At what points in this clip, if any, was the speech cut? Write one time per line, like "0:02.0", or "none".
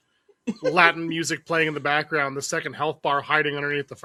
none